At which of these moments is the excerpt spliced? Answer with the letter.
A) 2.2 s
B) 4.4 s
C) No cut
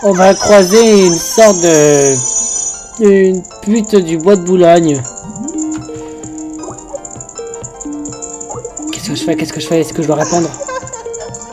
A